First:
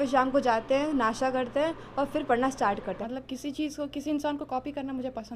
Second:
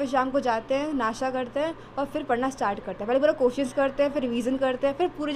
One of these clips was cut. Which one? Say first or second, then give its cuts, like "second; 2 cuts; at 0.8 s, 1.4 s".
first; 1 cut; at 3.0 s